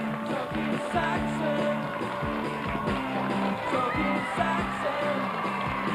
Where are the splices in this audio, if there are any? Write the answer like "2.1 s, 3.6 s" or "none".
none